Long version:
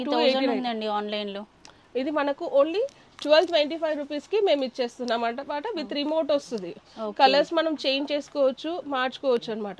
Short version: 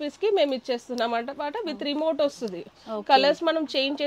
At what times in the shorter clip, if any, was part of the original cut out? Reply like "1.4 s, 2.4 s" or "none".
none